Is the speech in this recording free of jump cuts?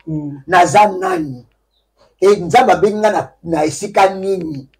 yes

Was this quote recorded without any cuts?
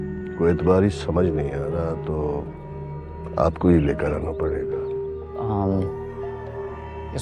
yes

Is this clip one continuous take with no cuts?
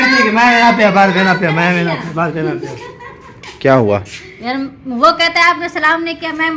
yes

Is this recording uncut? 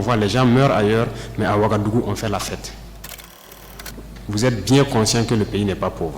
no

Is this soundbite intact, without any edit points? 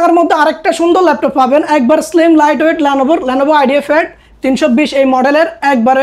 yes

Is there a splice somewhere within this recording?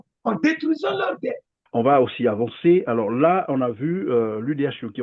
yes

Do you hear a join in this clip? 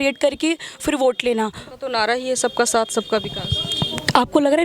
no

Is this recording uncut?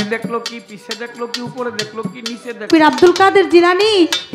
no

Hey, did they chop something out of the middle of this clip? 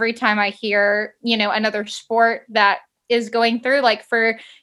no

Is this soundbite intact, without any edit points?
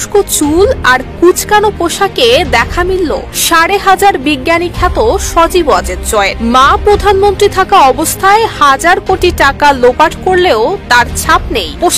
yes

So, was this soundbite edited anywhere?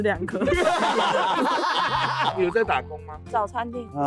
yes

